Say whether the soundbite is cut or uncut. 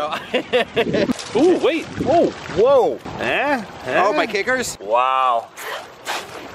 cut